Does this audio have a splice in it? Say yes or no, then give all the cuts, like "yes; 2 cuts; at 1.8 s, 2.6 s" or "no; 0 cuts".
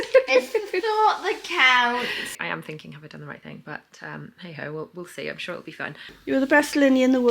yes; 2 cuts; at 2.3 s, 6.0 s